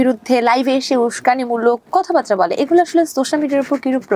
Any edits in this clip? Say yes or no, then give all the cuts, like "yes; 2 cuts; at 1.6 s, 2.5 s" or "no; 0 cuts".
no; 0 cuts